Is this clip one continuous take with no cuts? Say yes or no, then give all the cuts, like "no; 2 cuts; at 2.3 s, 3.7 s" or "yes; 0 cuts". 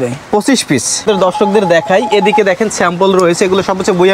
no; 1 cut; at 1.0 s